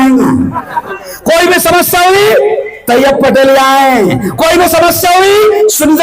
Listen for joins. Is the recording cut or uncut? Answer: cut